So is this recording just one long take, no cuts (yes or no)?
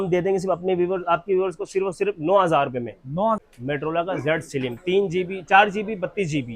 no